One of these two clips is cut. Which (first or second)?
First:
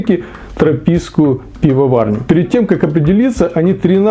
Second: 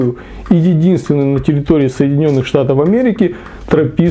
first